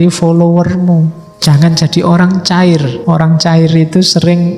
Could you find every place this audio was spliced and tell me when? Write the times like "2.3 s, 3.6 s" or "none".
1.3 s, 2.9 s

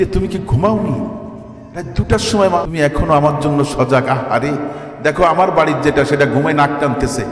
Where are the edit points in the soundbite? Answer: 2.7 s

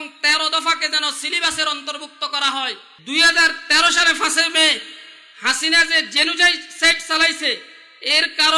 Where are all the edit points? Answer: 2.9 s

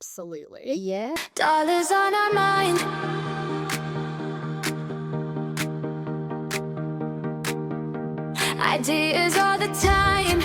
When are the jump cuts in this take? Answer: 1.2 s

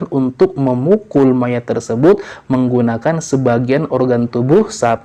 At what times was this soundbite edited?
none

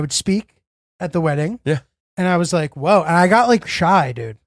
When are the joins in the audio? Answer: none

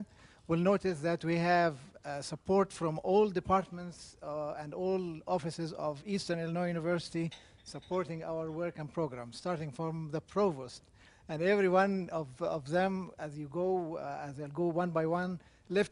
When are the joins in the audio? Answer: 2.7 s

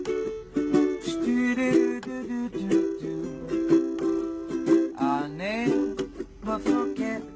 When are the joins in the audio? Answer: 1.3 s

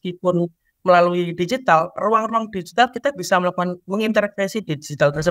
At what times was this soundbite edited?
3.8 s

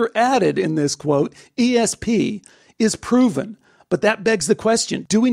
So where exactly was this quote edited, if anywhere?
none

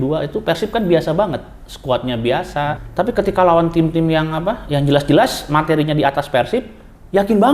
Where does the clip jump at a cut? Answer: 2.8 s

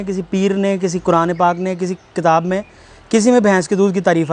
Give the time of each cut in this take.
none

